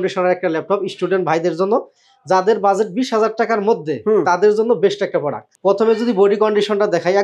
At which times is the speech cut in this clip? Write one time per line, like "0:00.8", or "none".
0:05.5